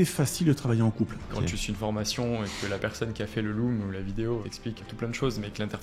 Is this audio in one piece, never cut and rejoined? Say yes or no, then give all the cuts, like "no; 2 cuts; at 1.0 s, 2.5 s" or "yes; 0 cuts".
no; 2 cuts; at 1.4 s, 4.8 s